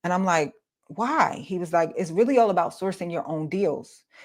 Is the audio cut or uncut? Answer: uncut